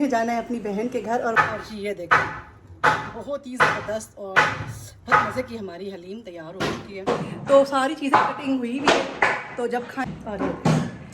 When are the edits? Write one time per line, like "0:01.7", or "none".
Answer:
0:01.4
0:07.1
0:10.1

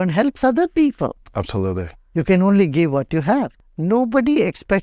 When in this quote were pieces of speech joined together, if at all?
0:02.0
0:03.6

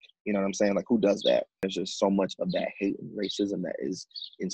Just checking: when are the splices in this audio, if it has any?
0:01.6

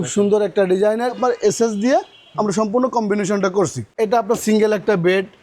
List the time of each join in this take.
0:01.2
0:03.8

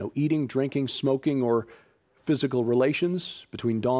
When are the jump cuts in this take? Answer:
0:02.7

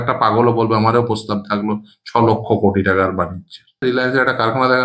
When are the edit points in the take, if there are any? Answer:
0:03.8

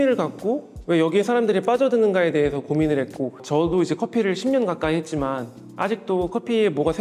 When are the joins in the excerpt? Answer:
none

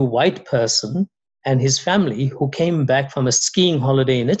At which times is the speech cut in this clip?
none

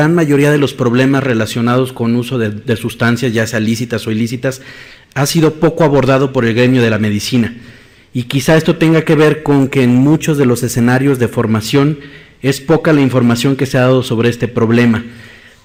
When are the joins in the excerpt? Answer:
none

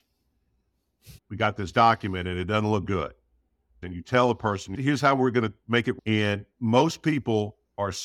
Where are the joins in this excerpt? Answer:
0:01.3
0:03.8
0:04.8

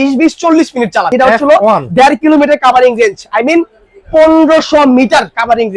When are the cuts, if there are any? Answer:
0:01.1

